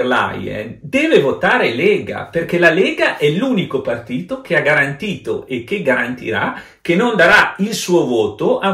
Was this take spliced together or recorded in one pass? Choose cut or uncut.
uncut